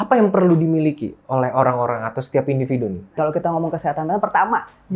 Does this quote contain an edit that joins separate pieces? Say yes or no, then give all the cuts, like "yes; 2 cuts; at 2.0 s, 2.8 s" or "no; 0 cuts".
no; 0 cuts